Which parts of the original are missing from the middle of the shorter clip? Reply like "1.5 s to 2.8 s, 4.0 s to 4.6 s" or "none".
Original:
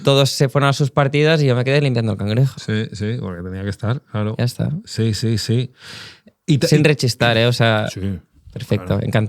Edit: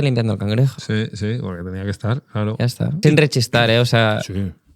4.8 s to 6.7 s